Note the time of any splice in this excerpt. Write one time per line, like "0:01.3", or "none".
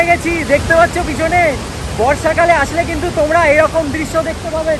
none